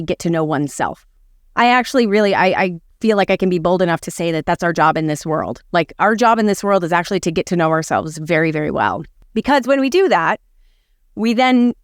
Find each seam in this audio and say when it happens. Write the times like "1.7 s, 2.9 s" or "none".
9.3 s